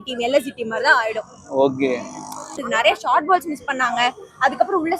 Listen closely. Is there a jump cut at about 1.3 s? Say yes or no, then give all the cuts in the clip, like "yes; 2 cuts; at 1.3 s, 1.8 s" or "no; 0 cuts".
no; 1 cut; at 2.6 s